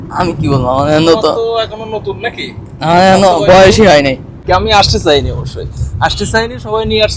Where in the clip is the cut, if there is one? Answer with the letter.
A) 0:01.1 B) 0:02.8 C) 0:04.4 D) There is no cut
C